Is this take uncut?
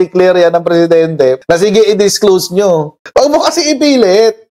no; 1 cut; at 1.4 s

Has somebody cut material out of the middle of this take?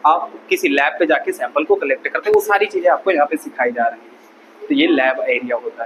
no; 0 cuts

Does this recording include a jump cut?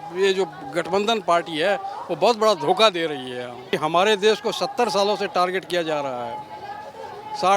yes; 1 cut; at 3.7 s

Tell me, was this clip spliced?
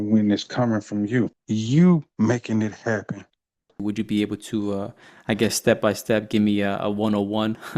yes; 2 cuts; at 1.3 s, 3.7 s

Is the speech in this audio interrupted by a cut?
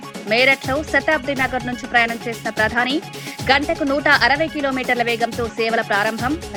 no; 0 cuts

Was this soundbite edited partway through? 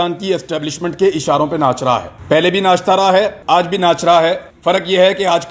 yes; 3 cuts; at 2.1 s, 3.4 s, 4.5 s

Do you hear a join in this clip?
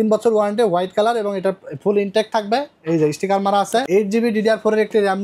yes; 1 cut; at 3.8 s

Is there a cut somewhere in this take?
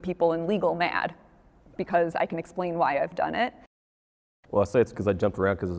yes; 1 cut; at 3.8 s

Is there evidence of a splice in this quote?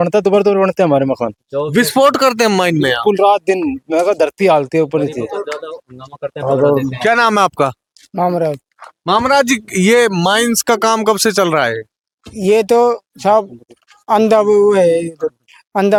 no; 0 cuts

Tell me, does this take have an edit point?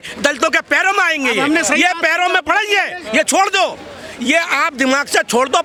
no; 0 cuts

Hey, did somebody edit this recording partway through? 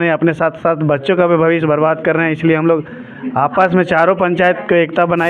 no; 0 cuts

